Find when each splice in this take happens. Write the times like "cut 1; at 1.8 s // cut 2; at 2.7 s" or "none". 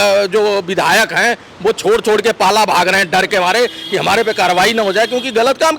none